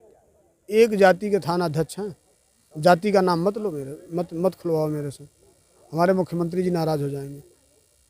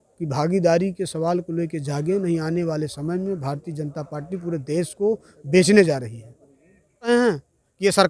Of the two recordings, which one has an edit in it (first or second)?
second